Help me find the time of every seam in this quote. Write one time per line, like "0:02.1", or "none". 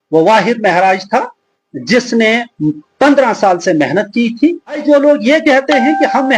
0:04.8